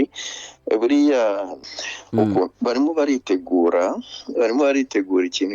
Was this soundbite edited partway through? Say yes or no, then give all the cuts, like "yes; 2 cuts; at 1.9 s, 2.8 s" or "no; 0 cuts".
yes; 1 cut; at 1.6 s